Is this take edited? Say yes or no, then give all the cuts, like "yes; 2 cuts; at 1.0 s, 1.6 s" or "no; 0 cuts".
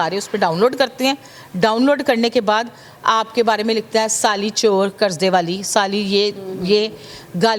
no; 0 cuts